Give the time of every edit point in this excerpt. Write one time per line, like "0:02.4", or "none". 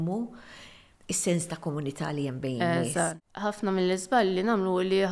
0:03.1